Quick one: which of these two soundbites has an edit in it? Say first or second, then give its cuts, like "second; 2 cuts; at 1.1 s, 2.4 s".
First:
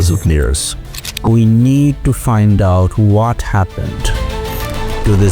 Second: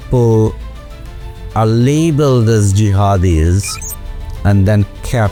first; 1 cut; at 1.1 s